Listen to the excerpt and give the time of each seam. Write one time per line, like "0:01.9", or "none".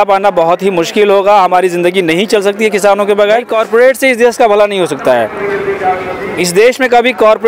0:03.5